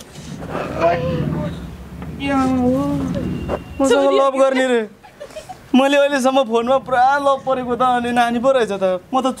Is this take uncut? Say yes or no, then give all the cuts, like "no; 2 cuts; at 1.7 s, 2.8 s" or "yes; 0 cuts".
yes; 0 cuts